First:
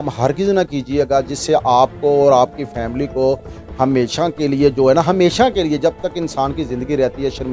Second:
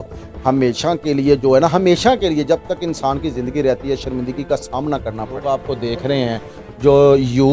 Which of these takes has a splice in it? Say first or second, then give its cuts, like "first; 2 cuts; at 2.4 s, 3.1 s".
second; 1 cut; at 5.4 s